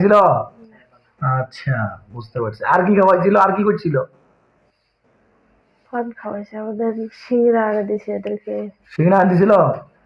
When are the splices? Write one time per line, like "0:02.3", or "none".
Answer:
none